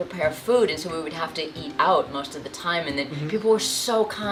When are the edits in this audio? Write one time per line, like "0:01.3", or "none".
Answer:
none